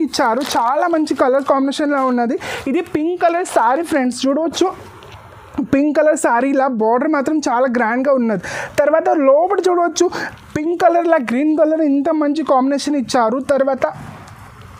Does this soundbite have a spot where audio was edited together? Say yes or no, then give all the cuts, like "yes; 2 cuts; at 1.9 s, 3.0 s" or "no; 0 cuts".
no; 0 cuts